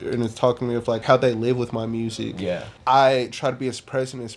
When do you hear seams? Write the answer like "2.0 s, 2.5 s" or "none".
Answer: 1.0 s, 2.7 s